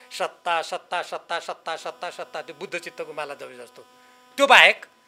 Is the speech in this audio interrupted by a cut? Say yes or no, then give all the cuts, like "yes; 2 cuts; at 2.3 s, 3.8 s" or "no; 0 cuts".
no; 0 cuts